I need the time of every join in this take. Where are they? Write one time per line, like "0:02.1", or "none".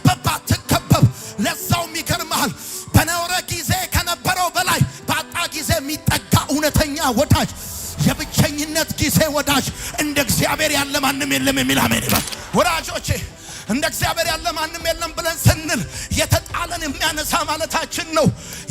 0:12.4